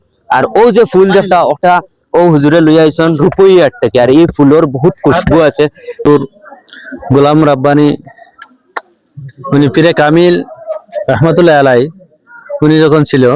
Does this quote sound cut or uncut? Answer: cut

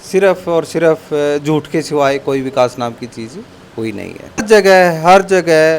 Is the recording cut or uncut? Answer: cut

